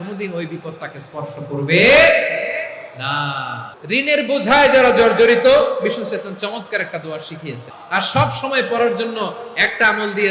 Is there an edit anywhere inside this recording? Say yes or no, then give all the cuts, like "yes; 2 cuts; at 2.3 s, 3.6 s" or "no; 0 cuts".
yes; 2 cuts; at 3.7 s, 7.7 s